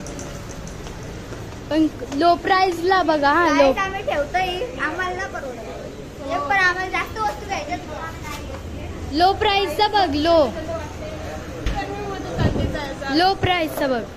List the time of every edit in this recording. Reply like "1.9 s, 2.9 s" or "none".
none